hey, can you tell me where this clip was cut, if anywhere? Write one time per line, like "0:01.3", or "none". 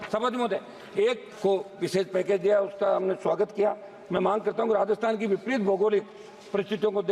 0:01.3